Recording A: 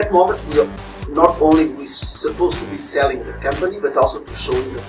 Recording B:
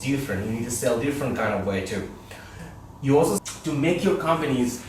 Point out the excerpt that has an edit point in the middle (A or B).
B